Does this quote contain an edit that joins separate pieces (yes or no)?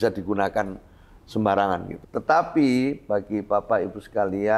yes